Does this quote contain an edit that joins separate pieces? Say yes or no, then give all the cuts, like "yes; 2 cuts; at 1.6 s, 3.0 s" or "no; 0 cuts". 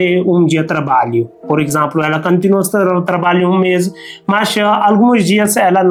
no; 0 cuts